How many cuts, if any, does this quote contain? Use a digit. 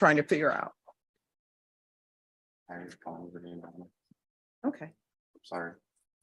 0